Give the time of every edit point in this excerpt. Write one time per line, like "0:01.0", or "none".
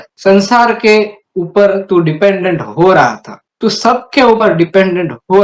none

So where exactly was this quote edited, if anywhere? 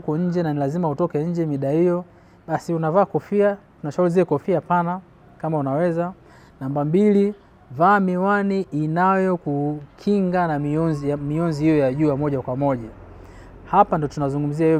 none

